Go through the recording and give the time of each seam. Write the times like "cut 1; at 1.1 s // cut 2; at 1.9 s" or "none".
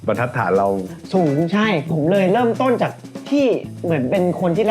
cut 1; at 1.8 s